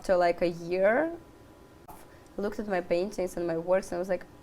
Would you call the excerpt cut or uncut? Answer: cut